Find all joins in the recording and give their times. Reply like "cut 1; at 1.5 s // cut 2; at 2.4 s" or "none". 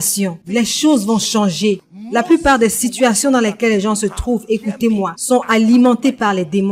none